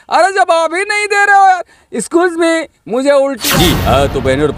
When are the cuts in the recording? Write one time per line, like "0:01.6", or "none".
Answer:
0:03.4

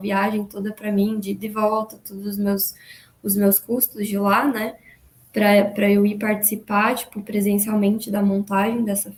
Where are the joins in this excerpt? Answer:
none

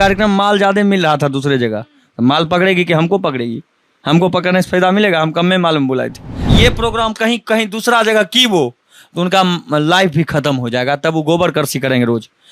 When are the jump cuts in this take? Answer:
0:06.4

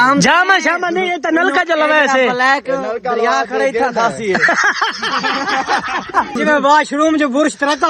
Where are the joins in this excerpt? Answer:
0:06.4

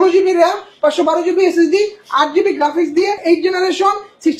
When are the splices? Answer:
0:03.2

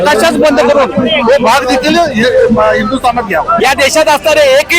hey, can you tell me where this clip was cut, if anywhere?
0:03.5

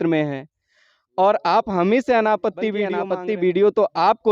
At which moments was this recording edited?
0:02.9

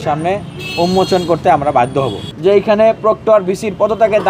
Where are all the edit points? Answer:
0:02.2

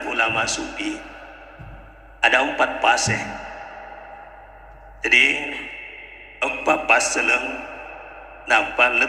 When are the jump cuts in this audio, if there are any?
none

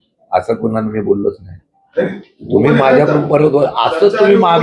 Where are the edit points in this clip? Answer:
none

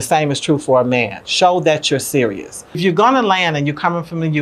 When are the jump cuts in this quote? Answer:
0:02.7

